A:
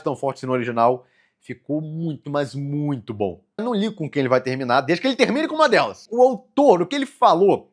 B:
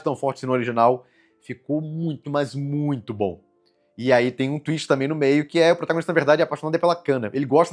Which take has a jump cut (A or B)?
A